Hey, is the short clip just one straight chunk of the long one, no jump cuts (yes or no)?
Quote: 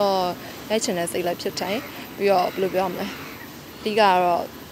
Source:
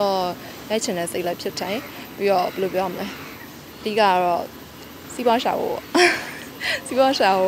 yes